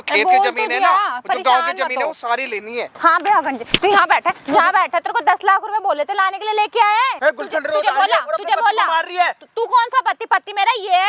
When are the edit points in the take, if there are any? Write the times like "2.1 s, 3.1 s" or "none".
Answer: 2.9 s, 7.2 s